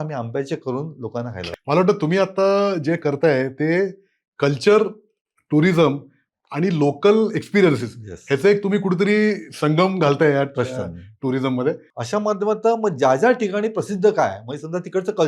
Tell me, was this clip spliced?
yes; 2 cuts; at 1.5 s, 11.9 s

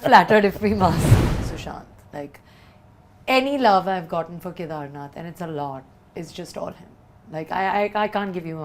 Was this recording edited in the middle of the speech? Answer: yes; 1 cut; at 1.2 s

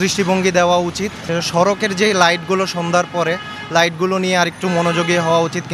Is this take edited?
no; 0 cuts

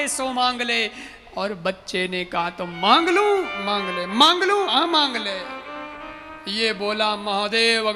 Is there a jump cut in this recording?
no; 0 cuts

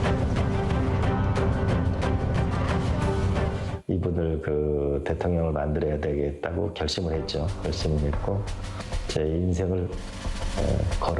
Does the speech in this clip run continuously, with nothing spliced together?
no; 1 cut; at 6.2 s

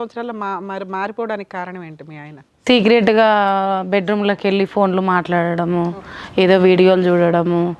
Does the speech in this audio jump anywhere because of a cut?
no; 0 cuts

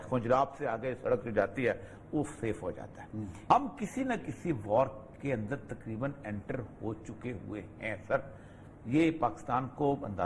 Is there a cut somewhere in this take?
yes; 1 cut; at 3.4 s

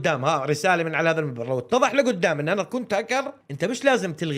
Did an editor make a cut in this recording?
yes; 1 cut; at 3.4 s

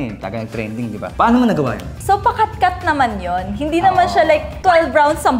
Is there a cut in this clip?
yes; 2 cuts; at 1.1 s, 1.9 s

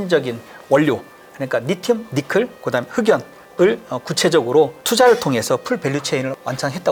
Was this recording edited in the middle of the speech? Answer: no; 0 cuts

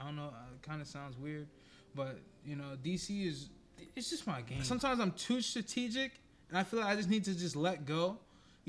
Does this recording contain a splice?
yes; 1 cut; at 4.5 s

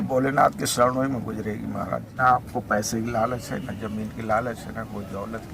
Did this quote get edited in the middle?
yes; 1 cut; at 2.1 s

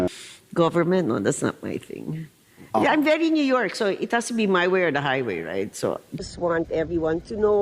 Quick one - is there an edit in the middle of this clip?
yes; 1 cut; at 6.2 s

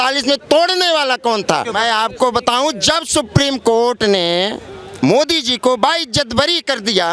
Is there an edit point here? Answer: no; 0 cuts

